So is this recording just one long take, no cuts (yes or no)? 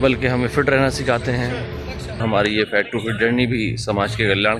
no